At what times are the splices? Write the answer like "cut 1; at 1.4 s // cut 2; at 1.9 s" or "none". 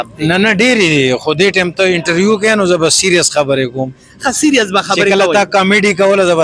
none